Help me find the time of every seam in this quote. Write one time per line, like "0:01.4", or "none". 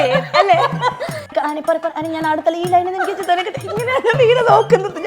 0:01.3